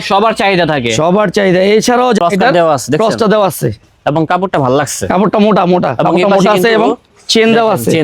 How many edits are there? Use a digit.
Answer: 1